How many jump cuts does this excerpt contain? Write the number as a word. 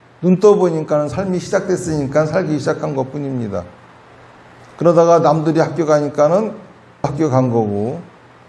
one